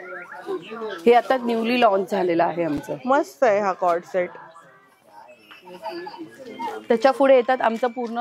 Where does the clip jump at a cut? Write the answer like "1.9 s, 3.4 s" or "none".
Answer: none